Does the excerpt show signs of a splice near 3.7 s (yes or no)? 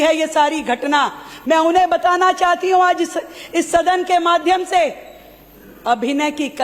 no